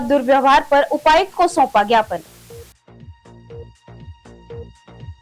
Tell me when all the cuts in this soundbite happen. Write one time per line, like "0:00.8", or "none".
0:02.4